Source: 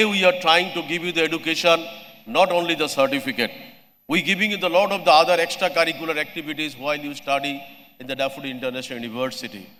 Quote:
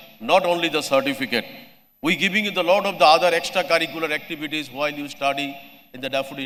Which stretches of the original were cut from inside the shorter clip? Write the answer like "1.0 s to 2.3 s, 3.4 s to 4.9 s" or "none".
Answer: none